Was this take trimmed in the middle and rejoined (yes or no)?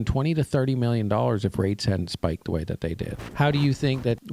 yes